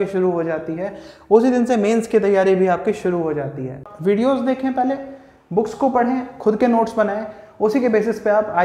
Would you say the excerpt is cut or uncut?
cut